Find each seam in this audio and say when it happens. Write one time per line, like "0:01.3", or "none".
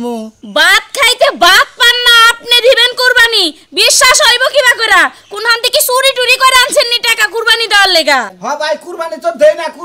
0:08.3